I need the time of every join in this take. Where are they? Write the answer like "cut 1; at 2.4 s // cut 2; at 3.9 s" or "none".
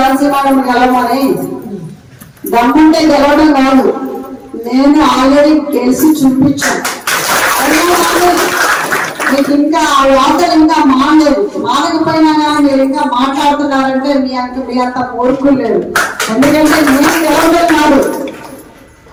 none